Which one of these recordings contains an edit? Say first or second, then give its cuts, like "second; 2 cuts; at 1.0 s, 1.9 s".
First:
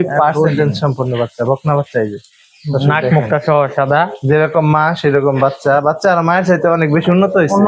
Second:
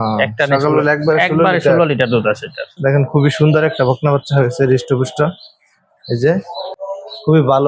second; 2 cuts; at 2.8 s, 6.7 s